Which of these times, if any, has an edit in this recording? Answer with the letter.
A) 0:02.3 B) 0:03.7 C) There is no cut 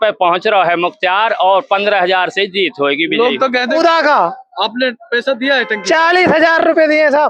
B